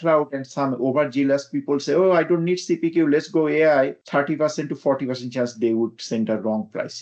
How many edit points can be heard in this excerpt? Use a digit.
1